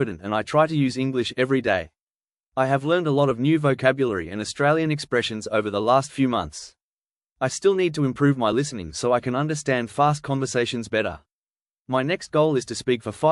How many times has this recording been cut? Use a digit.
3